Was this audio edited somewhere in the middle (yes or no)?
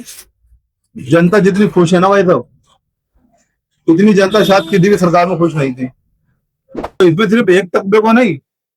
yes